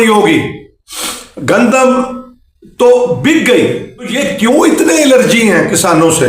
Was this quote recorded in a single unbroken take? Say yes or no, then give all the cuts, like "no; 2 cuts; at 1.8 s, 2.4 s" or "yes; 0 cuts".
no; 1 cut; at 4.2 s